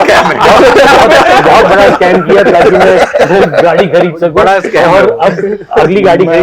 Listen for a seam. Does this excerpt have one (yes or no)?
no